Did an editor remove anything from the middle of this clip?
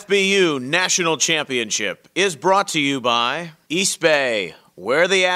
yes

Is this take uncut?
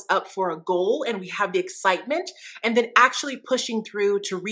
yes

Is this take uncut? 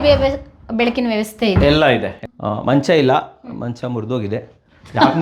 no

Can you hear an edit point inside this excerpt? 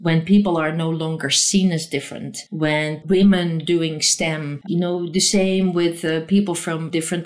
yes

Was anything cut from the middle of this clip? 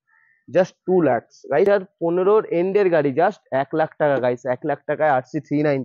yes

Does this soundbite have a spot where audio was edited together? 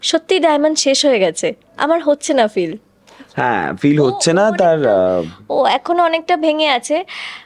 no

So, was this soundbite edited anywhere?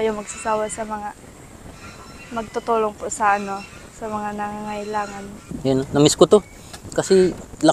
yes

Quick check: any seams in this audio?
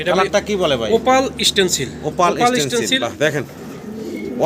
yes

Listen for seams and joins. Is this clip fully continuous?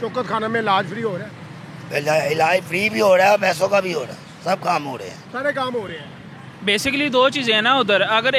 yes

